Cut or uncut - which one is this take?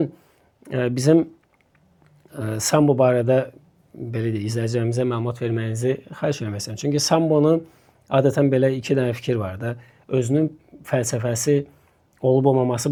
uncut